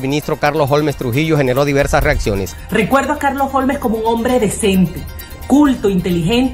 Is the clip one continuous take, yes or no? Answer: no